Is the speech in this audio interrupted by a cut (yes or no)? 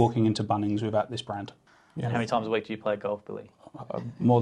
yes